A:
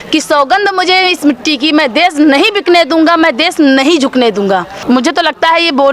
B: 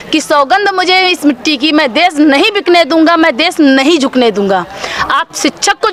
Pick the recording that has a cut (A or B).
A